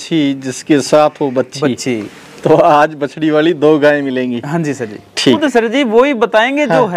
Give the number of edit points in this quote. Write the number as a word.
one